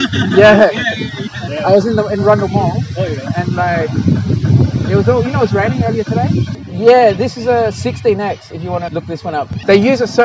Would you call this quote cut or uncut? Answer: cut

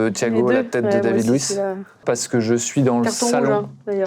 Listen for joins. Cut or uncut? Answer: cut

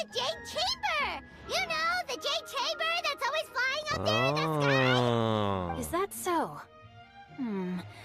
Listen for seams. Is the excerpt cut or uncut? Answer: uncut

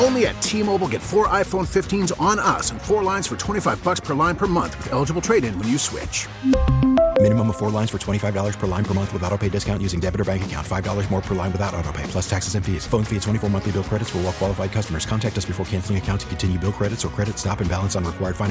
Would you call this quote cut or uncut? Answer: uncut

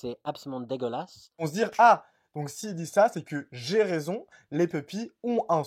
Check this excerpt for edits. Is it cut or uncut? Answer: cut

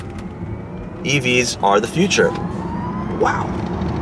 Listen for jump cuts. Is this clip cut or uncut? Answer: uncut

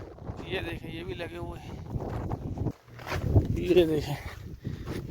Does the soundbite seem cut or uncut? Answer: cut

